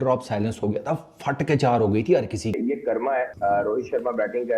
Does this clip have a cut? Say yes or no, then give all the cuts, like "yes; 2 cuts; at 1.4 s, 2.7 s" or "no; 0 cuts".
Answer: yes; 1 cut; at 2.9 s